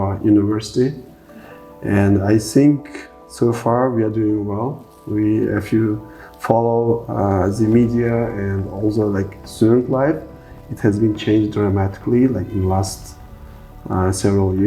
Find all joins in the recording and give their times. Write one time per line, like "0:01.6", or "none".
none